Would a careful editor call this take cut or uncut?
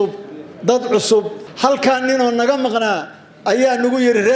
cut